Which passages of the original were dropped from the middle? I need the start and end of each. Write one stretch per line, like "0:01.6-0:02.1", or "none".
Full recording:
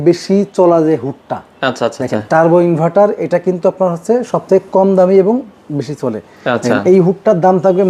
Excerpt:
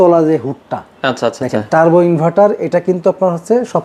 none

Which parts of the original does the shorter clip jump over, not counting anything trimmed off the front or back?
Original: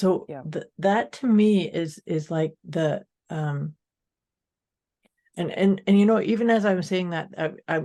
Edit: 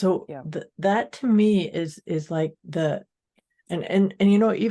0:03.2-0:04.8

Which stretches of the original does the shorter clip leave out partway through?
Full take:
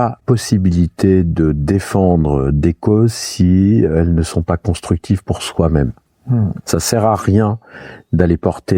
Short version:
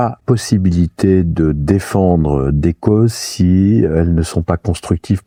none

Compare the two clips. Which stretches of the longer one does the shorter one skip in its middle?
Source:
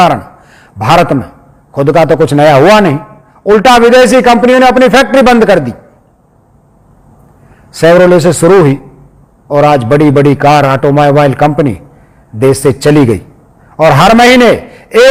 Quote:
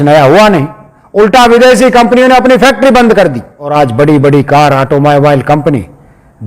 0:05.9-0:09.5

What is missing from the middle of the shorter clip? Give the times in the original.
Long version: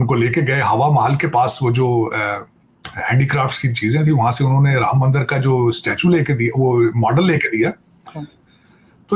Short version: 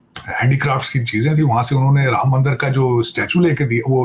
none

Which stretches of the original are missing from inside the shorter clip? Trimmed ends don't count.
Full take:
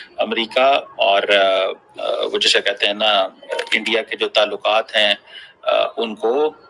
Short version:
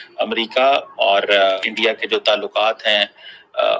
0:01.6-0:03.7

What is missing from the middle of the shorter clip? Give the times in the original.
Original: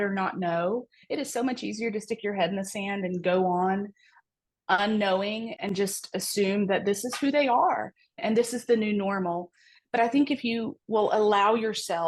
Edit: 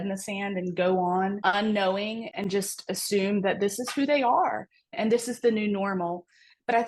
0:03.8-0:04.6

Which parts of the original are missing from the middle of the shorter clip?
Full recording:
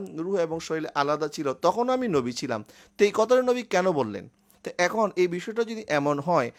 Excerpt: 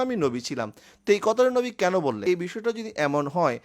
0:04.1-0:05.1

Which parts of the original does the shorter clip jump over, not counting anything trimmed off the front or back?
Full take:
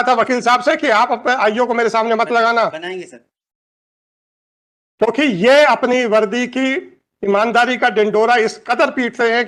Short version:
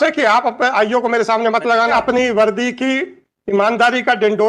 0:02.6-0:05.7

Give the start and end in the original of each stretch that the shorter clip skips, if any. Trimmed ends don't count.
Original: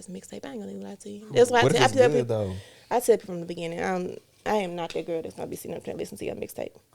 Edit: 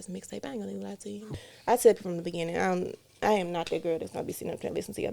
0:01.2-0:02.5

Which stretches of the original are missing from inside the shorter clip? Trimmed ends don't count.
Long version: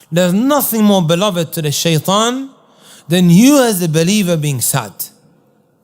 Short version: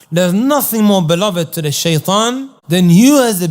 0:02.5-0:02.9

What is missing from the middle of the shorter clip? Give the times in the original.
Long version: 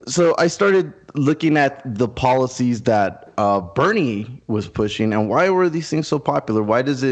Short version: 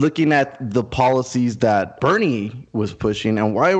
0:03.2-0:03.7

